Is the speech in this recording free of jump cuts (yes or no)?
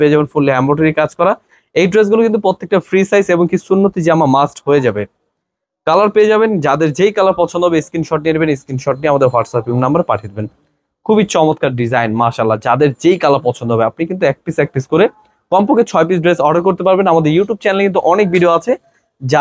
yes